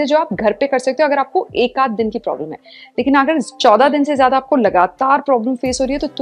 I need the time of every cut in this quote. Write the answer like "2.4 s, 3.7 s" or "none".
none